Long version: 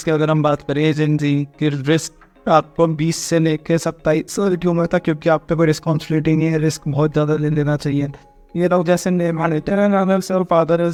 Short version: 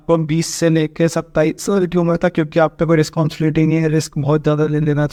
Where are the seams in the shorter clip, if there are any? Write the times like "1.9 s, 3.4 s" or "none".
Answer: none